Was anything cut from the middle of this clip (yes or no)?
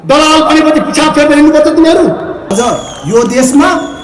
yes